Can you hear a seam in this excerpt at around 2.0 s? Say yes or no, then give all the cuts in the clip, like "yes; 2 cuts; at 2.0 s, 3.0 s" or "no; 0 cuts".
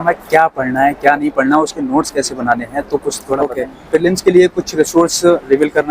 no; 1 cut; at 3.8 s